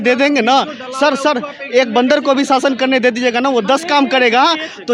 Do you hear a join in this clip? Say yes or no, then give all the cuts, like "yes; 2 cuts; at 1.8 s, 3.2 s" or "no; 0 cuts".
no; 0 cuts